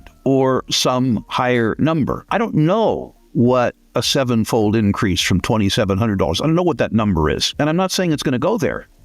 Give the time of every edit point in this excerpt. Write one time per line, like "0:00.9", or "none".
0:02.2
0:07.5